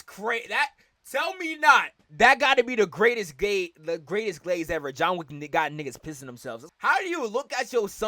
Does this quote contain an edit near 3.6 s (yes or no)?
no